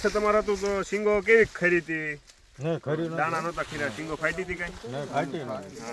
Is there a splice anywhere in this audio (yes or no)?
no